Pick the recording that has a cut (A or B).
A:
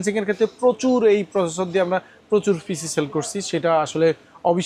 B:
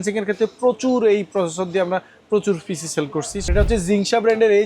B